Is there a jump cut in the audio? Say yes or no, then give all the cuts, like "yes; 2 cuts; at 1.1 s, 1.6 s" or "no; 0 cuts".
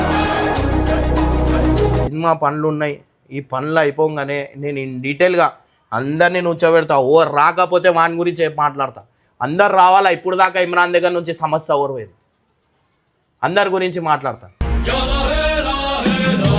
yes; 1 cut; at 2.1 s